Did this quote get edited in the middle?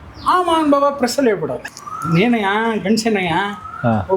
yes; 1 cut; at 1.6 s

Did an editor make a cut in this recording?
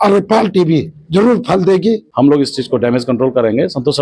yes; 1 cut; at 2.1 s

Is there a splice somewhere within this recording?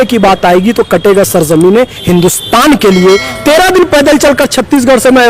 yes; 1 cut; at 3.3 s

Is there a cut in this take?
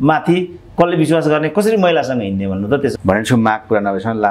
yes; 1 cut; at 2.9 s

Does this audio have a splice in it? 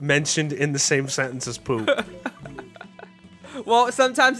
no; 0 cuts

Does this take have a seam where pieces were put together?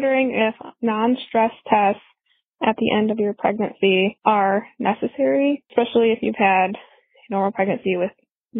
yes; 2 cuts; at 4.2 s, 5.6 s

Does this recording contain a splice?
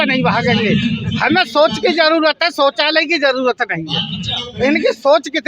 no; 0 cuts

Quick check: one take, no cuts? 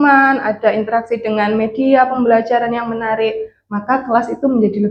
yes; 0 cuts

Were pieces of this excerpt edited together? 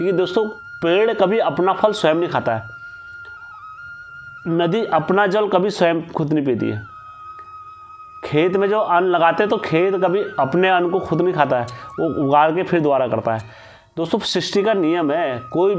no; 0 cuts

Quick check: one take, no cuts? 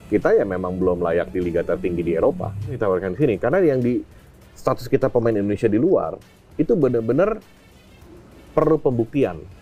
no; 1 cut; at 2.8 s

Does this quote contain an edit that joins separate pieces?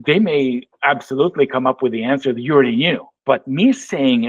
yes; 1 cut; at 3.1 s

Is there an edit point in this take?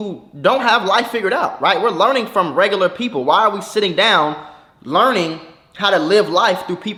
no; 0 cuts

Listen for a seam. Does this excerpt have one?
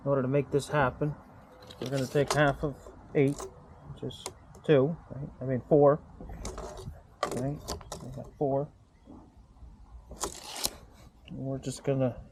no; 0 cuts

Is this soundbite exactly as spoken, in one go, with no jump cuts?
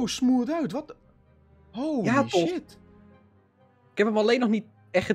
yes; 0 cuts

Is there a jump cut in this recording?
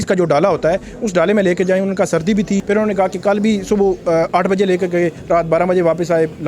yes; 1 cut; at 2.6 s

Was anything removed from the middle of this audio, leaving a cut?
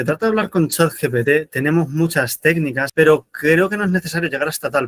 yes; 1 cut; at 2.8 s

